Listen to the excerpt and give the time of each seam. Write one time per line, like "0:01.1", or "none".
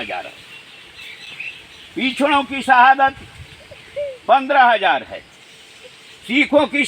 none